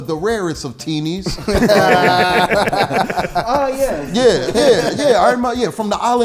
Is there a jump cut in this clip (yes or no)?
no